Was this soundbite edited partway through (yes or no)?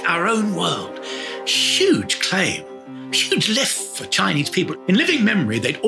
yes